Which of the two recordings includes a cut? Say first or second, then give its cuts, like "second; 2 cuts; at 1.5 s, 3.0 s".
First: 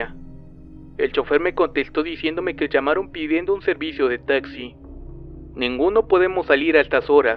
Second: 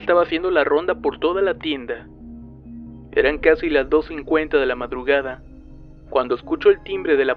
second; 1 cut; at 6.4 s